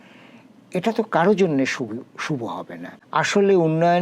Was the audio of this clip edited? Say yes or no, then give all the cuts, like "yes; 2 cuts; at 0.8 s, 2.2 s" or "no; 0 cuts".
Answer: yes; 1 cut; at 2.8 s